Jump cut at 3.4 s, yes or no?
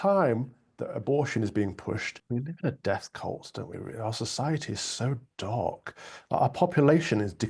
no